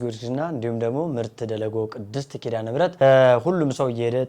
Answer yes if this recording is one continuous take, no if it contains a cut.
no